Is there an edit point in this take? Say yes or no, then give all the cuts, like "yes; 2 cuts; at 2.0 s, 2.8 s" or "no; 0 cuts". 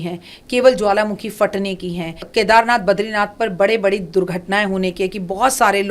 yes; 1 cut; at 2.2 s